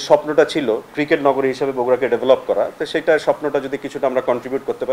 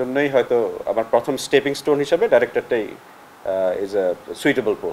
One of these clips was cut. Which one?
first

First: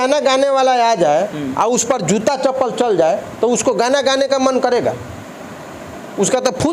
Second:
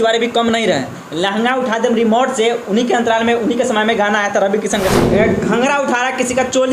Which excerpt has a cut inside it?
second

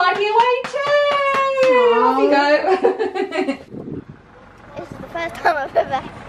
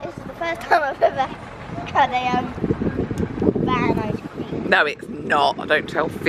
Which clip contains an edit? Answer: first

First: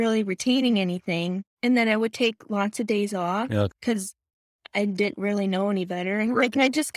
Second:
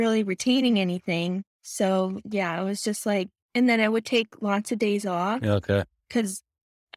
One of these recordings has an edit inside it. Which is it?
first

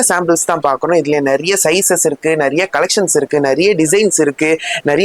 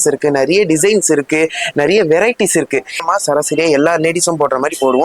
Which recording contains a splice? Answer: second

